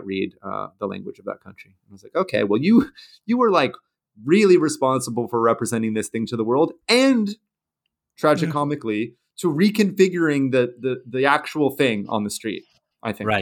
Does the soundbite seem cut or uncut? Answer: uncut